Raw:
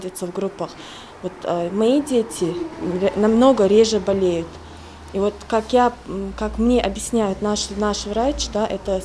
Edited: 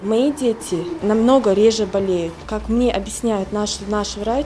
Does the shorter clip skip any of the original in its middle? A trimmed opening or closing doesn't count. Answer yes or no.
yes